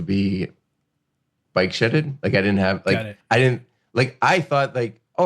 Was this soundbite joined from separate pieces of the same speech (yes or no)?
yes